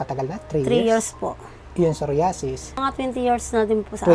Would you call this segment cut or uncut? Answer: cut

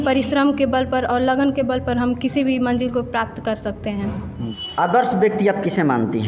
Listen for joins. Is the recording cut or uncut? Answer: cut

